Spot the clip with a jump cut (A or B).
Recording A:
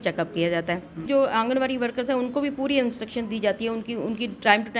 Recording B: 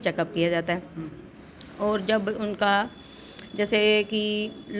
A